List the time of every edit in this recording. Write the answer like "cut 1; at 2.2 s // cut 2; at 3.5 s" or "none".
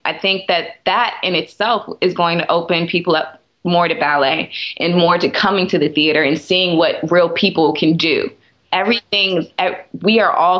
none